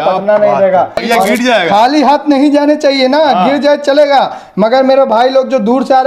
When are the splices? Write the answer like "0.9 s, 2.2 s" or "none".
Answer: 1.0 s